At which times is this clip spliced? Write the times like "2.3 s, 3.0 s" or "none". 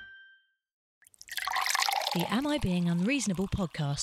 1.1 s

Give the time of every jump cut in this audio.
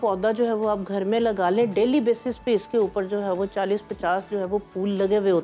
none

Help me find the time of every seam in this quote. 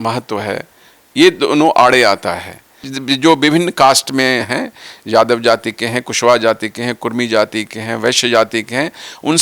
2.9 s

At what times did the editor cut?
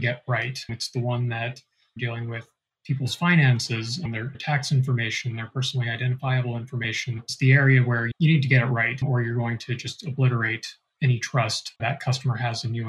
4.3 s, 11.8 s

